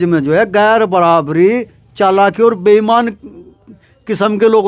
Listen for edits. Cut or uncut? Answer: uncut